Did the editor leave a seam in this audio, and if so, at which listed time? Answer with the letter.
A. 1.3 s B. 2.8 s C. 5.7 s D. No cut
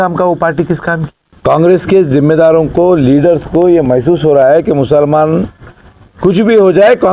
A